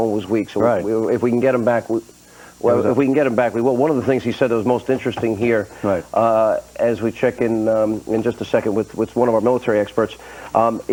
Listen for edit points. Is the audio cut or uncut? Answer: uncut